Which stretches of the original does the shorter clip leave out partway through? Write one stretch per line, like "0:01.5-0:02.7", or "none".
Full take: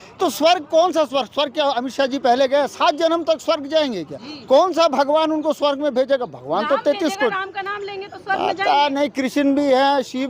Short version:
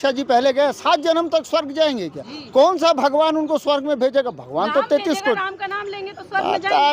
none